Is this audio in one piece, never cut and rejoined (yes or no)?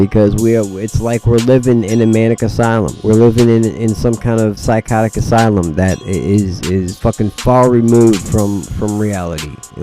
no